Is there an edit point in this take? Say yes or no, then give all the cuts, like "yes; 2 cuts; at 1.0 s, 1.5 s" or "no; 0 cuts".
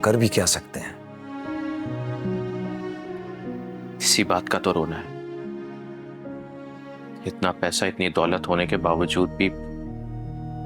no; 0 cuts